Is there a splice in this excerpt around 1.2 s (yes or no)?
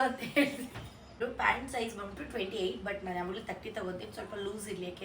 yes